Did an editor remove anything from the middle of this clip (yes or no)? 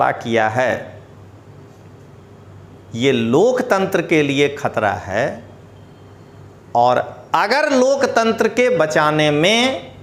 no